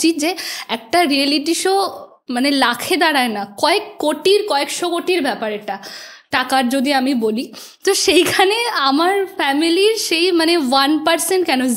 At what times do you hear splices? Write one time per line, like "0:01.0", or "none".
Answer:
none

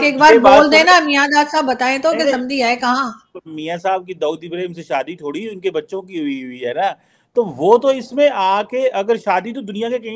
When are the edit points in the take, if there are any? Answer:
none

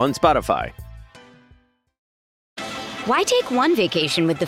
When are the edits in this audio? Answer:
0:02.4

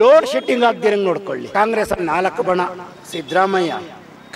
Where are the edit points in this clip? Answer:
0:01.4

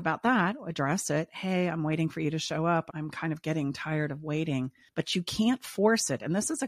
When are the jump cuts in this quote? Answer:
0:04.8

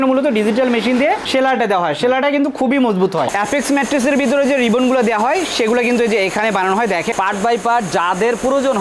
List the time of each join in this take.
0:03.3
0:07.1

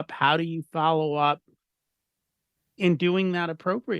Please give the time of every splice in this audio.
0:02.8

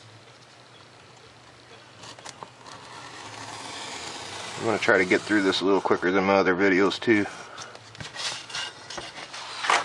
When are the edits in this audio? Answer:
none

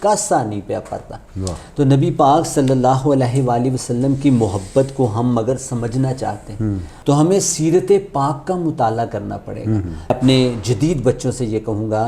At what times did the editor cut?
0:06.9
0:10.1

